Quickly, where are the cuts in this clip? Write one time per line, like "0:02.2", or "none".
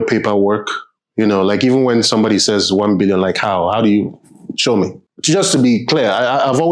0:05.1